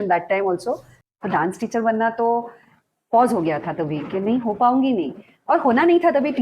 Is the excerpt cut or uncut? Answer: cut